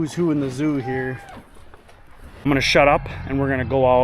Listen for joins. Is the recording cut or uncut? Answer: cut